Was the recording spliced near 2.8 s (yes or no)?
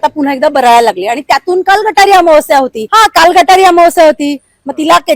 yes